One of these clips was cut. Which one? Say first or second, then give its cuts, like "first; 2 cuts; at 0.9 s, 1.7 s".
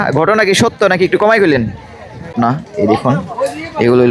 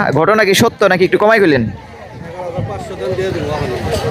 first; 1 cut; at 2.3 s